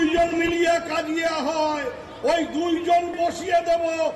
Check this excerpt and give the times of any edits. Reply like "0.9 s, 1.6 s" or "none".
3.1 s